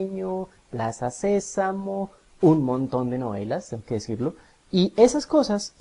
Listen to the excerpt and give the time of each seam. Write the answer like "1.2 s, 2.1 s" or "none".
4.5 s

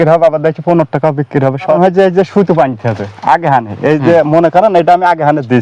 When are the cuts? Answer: 1.8 s

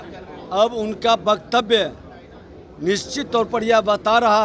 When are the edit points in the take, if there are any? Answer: none

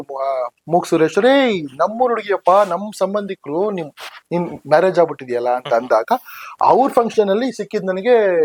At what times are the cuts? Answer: none

